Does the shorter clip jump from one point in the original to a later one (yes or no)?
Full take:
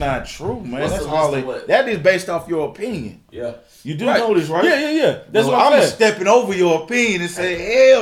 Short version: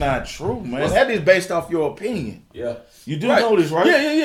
yes